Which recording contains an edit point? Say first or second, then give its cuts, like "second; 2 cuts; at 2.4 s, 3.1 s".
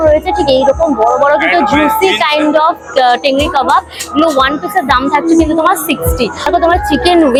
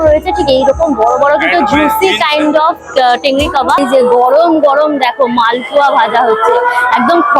second; 1 cut; at 3.8 s